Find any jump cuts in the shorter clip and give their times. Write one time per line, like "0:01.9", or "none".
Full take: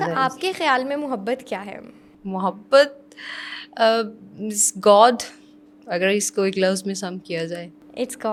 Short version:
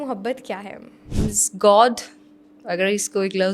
0:01.0